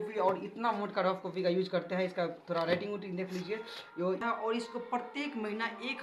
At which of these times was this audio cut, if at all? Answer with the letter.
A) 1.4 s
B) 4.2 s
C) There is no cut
B